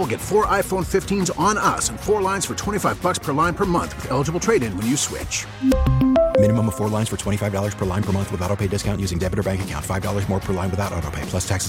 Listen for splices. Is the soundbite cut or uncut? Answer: uncut